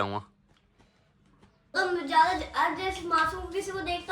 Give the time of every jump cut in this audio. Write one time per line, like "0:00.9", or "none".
0:01.8